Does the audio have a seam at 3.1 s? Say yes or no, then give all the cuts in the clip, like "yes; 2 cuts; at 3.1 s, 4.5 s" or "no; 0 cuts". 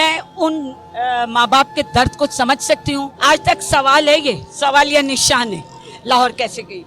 yes; 1 cut; at 3.1 s